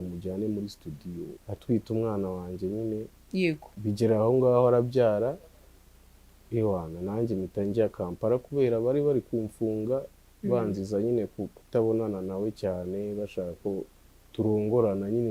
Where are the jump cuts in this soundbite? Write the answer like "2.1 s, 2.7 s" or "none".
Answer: 1.3 s